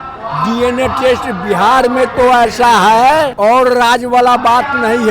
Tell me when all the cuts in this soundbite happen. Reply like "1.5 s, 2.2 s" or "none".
3.3 s